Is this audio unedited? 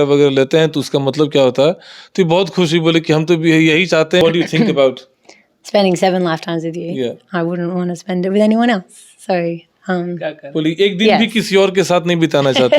no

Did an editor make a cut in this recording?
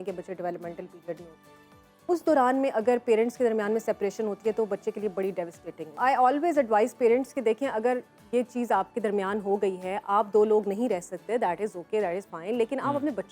yes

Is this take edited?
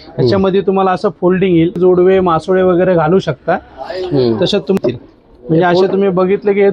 yes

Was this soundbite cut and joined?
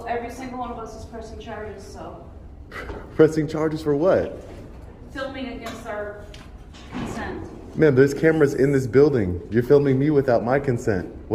no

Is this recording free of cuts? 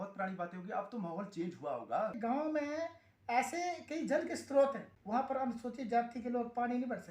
no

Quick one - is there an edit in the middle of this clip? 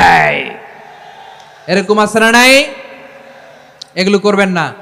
no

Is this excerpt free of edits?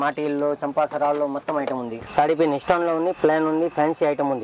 no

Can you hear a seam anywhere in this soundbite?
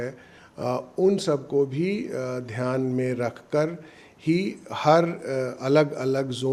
no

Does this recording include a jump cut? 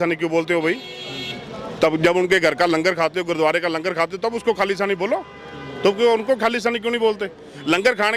no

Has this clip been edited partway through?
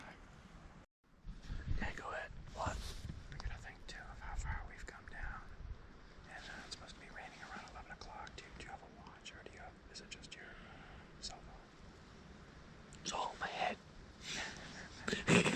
yes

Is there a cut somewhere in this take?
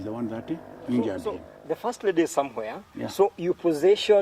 yes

